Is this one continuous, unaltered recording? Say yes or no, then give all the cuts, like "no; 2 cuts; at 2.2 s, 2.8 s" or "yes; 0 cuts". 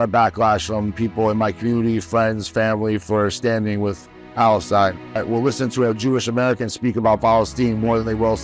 no; 1 cut; at 5.2 s